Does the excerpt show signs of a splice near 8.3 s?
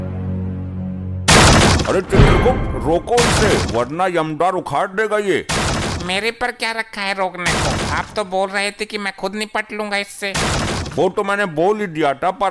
no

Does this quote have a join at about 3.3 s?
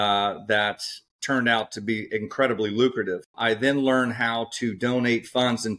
yes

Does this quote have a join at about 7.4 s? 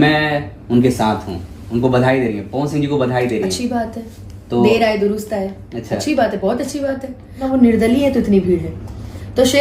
yes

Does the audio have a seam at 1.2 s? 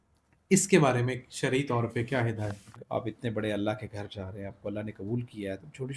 no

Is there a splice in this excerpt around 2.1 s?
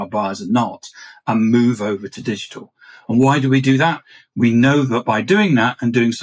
yes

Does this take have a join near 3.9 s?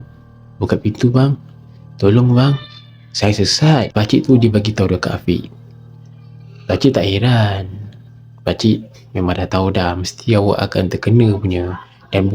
yes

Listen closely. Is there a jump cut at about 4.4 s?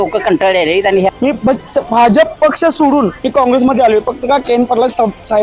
no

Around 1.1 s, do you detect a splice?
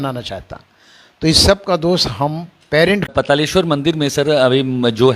no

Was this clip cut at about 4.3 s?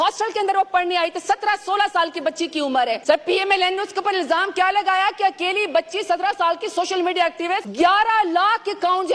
no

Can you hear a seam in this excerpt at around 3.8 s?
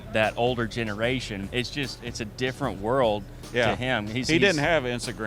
no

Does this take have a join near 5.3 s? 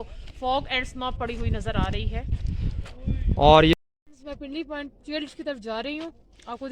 no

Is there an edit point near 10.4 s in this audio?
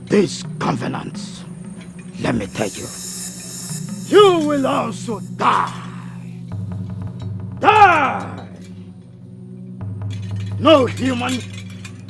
yes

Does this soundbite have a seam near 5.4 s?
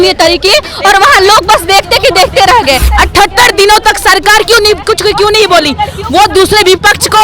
no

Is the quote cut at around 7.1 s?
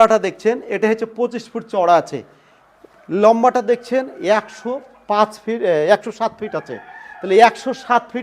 no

